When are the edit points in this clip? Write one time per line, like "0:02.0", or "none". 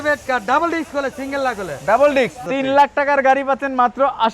0:02.4